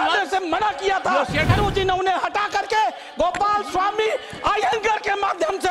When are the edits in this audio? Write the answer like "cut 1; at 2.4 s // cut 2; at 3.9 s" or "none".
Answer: cut 1; at 1.5 s